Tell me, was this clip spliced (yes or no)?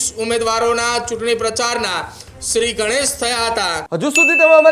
yes